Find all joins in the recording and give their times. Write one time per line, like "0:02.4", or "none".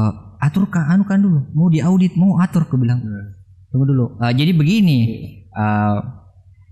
none

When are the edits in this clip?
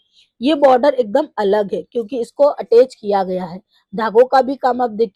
none

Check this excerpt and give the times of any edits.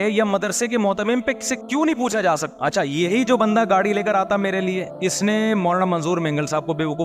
0:02.5

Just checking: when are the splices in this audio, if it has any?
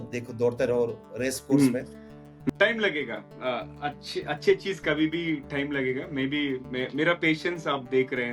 0:02.4

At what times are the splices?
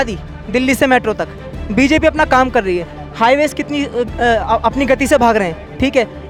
none

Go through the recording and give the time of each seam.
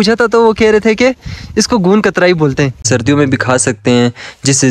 0:02.8

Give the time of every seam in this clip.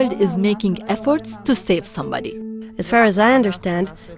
0:02.6

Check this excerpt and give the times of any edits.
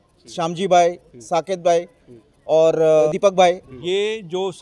0:03.1
0:03.7

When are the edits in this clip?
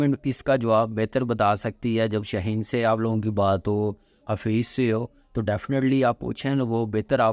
none

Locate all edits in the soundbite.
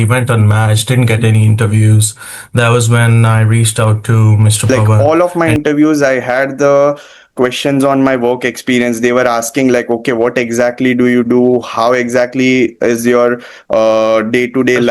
0:04.8

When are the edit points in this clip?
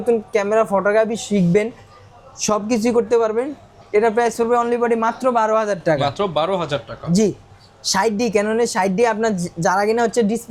none

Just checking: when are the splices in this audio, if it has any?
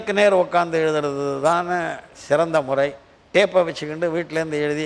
none

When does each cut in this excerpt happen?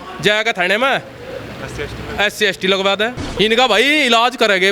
0:03.2

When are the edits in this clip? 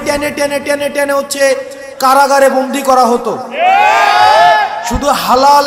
none

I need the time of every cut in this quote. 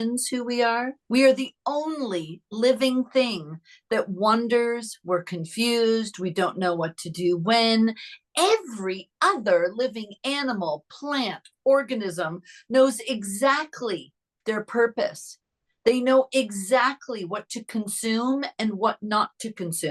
0:01.0

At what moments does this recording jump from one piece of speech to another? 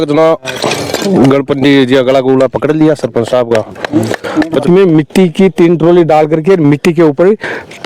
0:04.6

